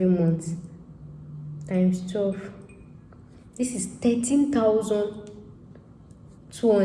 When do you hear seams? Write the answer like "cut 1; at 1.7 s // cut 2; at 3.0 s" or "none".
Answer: none